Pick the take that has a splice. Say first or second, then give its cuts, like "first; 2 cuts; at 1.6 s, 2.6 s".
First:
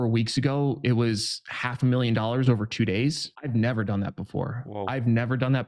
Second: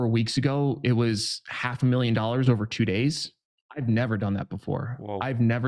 first; 1 cut; at 3.3 s